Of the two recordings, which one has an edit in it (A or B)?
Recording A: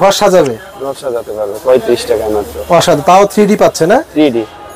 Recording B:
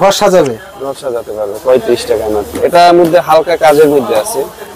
B